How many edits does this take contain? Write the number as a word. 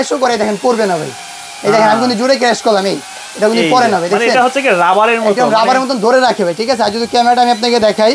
zero